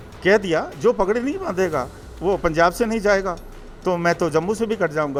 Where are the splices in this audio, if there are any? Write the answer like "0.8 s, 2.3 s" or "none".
none